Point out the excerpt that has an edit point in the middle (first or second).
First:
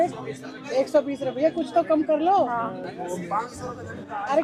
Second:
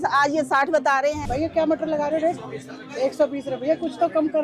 second